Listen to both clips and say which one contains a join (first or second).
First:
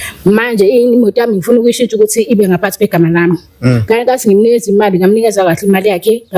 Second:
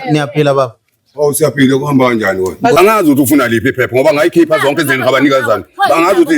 second